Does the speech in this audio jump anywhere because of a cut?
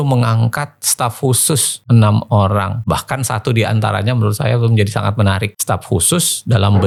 no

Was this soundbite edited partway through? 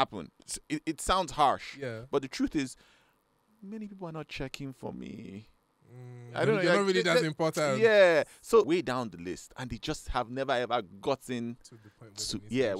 yes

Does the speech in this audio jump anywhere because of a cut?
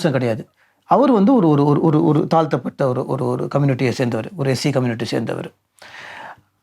no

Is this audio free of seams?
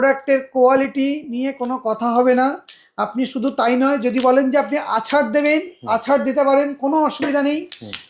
yes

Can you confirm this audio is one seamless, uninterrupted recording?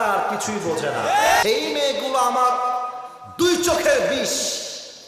no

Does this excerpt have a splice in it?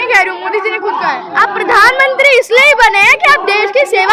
yes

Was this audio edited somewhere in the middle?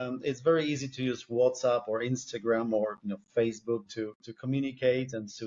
no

